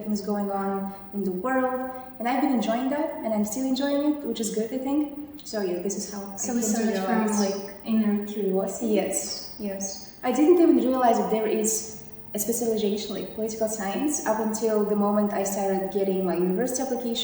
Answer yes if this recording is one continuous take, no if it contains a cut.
yes